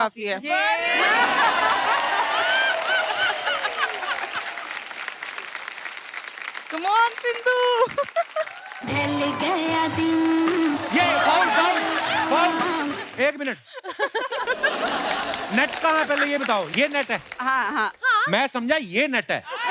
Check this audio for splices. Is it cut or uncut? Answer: uncut